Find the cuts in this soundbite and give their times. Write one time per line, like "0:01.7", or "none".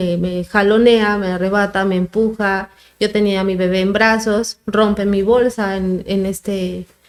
none